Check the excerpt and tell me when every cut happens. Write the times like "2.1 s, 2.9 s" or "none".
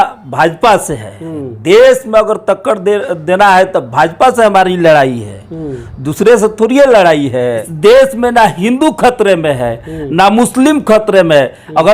7.7 s